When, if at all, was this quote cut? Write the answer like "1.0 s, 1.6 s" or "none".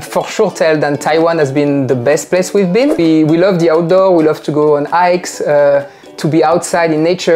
3.0 s